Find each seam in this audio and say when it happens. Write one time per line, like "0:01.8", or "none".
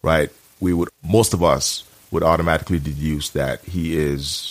0:00.9